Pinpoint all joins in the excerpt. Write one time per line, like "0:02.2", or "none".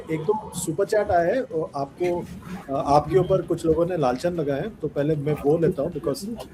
none